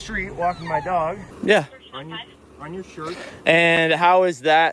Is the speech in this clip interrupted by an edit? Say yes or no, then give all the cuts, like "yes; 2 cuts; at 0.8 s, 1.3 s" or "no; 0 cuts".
yes; 1 cut; at 1.3 s